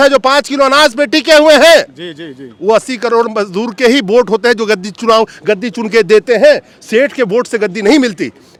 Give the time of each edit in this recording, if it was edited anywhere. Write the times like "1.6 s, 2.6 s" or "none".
none